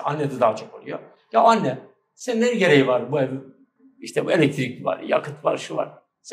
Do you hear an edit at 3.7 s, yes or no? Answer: no